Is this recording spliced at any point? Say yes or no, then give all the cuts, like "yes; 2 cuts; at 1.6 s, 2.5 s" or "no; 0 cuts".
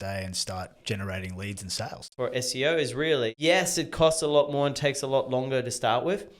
yes; 2 cuts; at 2.1 s, 3.4 s